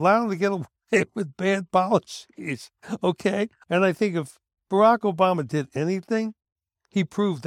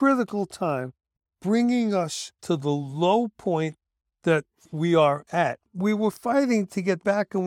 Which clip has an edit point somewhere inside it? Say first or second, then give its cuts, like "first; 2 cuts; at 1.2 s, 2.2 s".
first; 1 cut; at 3.6 s